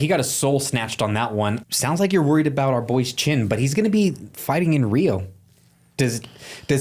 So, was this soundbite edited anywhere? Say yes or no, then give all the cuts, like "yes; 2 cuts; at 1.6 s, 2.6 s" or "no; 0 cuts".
yes; 1 cut; at 1.6 s